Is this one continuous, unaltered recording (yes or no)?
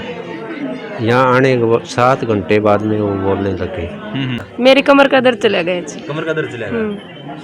no